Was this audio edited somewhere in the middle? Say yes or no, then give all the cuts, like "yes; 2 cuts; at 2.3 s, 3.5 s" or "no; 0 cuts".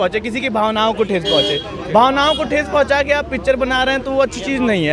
no; 0 cuts